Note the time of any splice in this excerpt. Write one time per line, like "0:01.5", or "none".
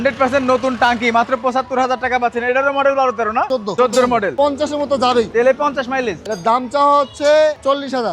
0:03.6
0:04.3